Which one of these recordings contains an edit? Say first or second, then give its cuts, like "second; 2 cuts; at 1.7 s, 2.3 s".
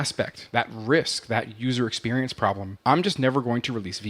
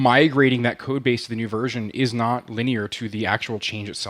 first; 1 cut; at 2.7 s